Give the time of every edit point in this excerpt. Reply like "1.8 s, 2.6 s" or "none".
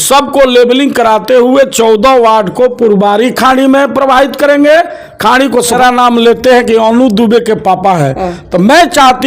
5.8 s